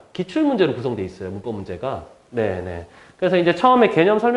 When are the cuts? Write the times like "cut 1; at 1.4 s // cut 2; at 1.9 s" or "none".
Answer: none